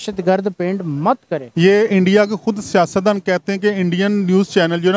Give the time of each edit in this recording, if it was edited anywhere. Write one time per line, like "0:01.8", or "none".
0:01.4

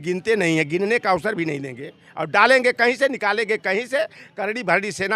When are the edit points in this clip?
none

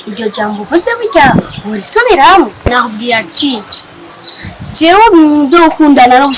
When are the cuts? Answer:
0:02.6

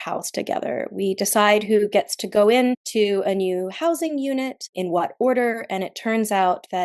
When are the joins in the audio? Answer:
0:02.8
0:04.7

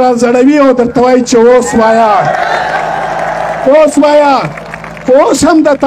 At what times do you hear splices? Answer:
none

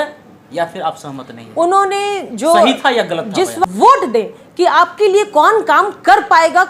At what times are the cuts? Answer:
0:03.7

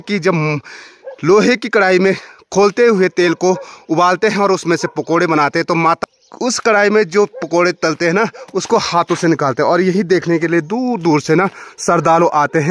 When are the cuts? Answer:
none

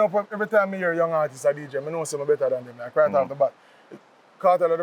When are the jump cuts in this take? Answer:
none

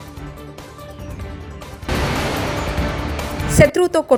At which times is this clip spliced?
none

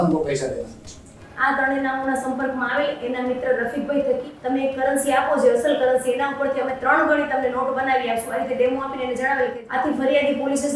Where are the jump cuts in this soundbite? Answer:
0:01.2
0:04.3
0:09.6

